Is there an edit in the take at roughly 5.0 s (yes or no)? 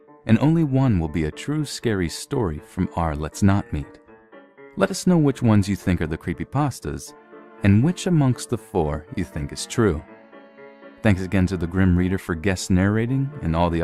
yes